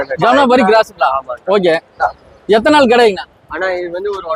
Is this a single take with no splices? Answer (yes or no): yes